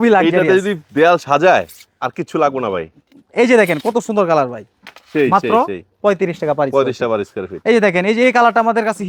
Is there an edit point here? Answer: no; 0 cuts

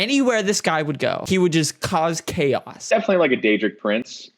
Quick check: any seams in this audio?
yes; 2 cuts; at 1.2 s, 2.9 s

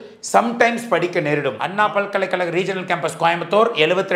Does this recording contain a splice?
yes; 1 cut; at 1.6 s

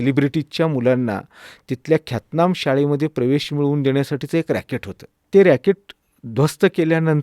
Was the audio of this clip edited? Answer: yes; 1 cut; at 5.2 s

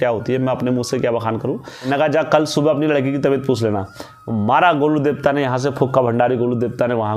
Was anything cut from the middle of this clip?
yes; 1 cut; at 1.7 s

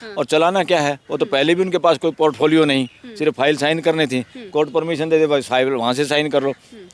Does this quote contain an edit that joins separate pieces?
no; 0 cuts

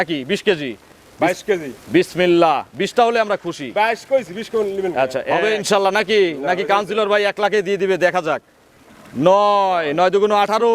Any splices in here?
yes; 1 cut; at 5.3 s

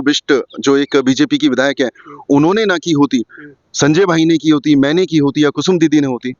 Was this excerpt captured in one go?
yes; 0 cuts

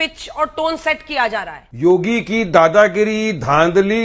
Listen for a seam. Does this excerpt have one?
yes; 1 cut; at 1.6 s

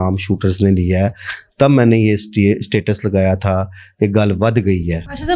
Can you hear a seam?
no; 0 cuts

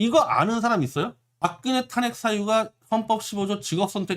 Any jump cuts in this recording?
yes; 1 cut; at 1.2 s

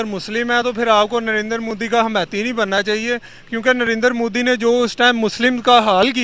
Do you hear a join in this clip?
no; 0 cuts

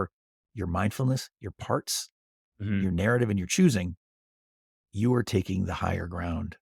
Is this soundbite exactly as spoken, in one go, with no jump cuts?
yes; 0 cuts

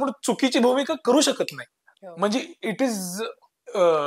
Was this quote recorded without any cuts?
yes; 0 cuts

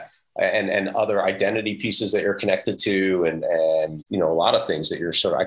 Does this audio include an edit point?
yes; 1 cut; at 4.0 s

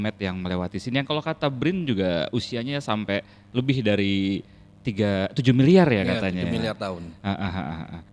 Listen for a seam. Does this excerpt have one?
no; 0 cuts

